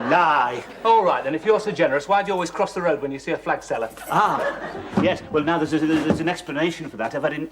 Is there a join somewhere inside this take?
no; 0 cuts

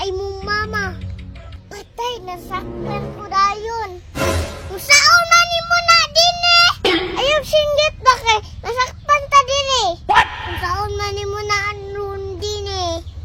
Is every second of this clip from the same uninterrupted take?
yes; 0 cuts

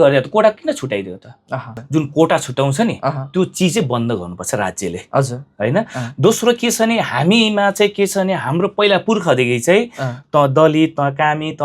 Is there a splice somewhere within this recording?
yes; 1 cut; at 1.8 s

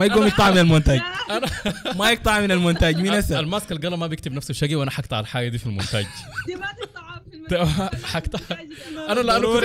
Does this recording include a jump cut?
no; 0 cuts

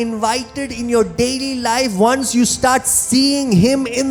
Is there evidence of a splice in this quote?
no; 0 cuts

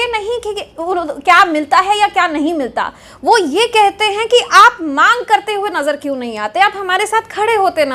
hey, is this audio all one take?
yes; 0 cuts

